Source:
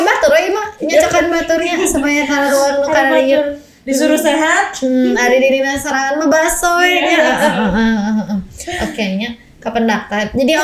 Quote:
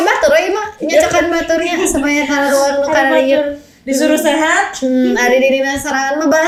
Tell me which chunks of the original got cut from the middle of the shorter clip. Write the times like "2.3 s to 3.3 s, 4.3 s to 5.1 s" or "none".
none

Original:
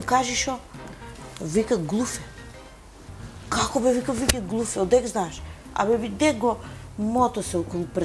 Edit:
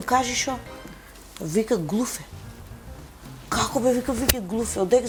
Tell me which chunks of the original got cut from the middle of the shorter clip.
none

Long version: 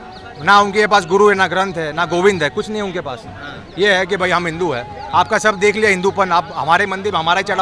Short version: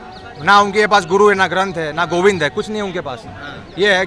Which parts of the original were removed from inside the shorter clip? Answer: none

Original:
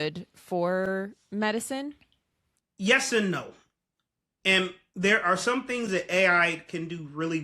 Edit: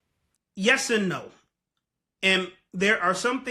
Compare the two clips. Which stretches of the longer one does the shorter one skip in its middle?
none

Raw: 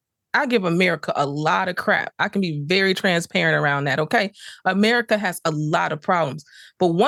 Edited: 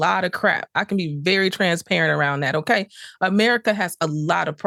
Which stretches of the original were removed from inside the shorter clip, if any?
none

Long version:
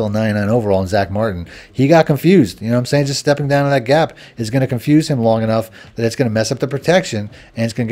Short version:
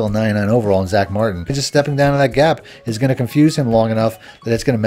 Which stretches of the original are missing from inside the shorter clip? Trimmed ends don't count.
1.6 s to 3.1 s

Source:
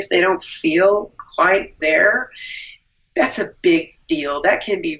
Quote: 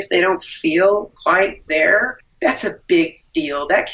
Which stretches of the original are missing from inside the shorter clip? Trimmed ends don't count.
1.1 s to 1.2 s, 2.3 s to 3.0 s

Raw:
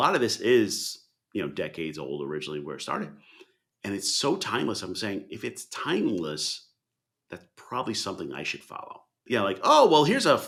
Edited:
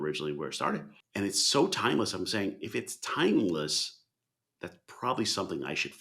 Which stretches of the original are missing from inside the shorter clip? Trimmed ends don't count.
3.2 s to 3.7 s

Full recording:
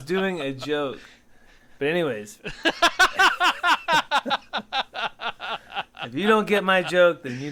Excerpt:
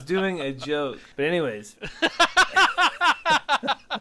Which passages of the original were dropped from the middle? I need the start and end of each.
1.0 s to 1.7 s

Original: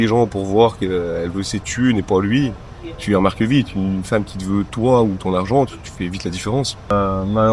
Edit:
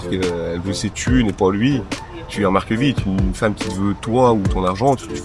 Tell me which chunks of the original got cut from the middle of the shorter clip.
none

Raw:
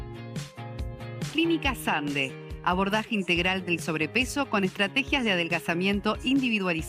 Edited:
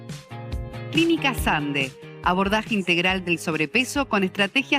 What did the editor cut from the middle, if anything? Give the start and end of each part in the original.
1.2 s to 1.3 s

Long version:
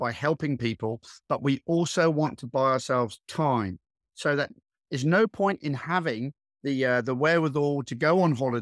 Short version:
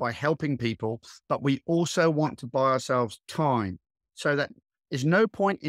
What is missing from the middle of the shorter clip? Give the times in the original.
none

